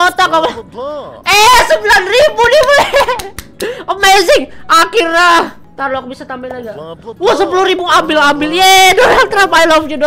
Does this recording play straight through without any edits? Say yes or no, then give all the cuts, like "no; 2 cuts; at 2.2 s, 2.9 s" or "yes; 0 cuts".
yes; 0 cuts